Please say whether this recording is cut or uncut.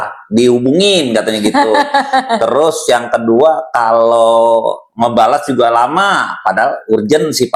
uncut